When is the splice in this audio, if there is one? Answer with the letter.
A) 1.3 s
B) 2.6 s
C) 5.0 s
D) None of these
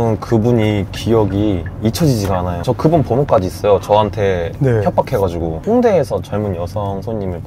B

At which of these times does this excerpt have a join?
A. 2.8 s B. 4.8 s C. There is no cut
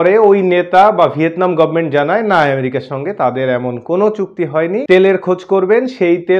B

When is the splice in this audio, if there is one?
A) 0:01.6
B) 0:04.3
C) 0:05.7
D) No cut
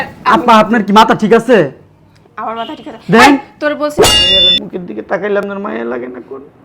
B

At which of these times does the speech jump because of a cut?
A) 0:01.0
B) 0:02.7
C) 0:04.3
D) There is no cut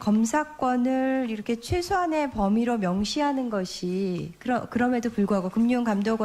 B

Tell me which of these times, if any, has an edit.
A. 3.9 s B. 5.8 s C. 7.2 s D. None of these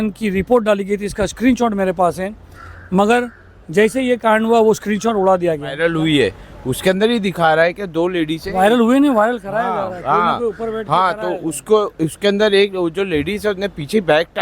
B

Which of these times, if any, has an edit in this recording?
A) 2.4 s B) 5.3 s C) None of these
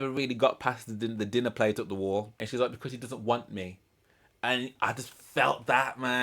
A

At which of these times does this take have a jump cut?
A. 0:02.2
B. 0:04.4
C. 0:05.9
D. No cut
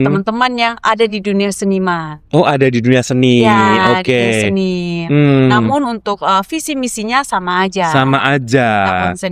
D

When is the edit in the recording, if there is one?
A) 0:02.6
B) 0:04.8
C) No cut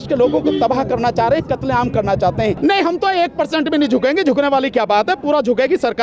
A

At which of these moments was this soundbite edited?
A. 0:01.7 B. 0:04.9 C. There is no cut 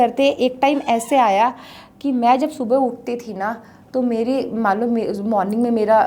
C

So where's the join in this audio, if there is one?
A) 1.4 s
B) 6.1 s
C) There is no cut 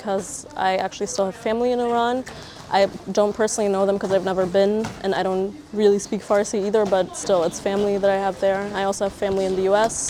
C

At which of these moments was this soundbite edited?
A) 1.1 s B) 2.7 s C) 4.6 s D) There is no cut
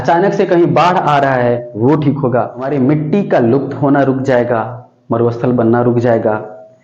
B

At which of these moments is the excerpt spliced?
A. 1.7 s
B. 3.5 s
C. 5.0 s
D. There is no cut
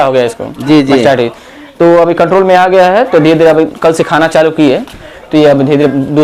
D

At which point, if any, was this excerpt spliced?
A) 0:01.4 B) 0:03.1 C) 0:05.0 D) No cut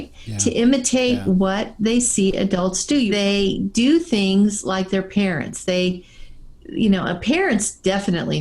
B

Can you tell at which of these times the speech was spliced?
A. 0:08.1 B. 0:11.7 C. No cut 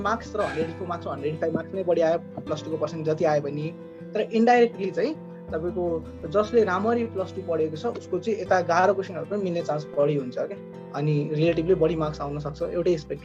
C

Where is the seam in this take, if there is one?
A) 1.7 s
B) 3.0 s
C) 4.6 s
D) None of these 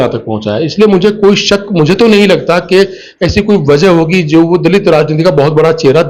D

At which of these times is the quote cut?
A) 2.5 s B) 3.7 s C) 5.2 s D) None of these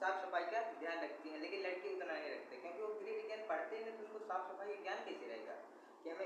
D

